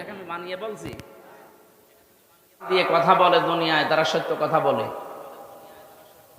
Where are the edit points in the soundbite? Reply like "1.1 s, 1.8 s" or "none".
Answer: 2.7 s